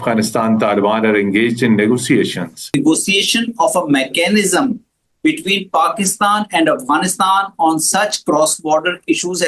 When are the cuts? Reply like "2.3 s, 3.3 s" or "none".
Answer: 2.8 s